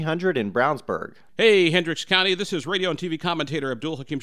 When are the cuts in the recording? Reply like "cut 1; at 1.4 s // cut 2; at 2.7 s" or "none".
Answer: cut 1; at 1.2 s